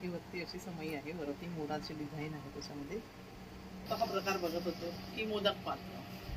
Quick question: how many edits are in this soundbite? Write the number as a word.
one